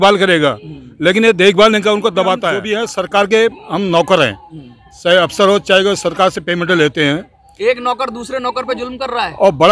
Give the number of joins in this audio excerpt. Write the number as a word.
one